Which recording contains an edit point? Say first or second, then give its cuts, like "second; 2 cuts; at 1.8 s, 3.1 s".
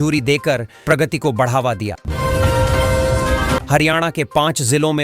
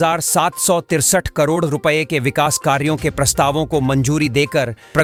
first; 2 cuts; at 2.0 s, 3.6 s